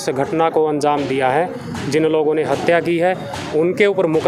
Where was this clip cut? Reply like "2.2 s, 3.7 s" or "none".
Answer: none